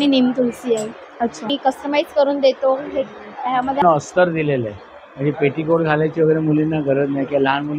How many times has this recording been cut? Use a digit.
2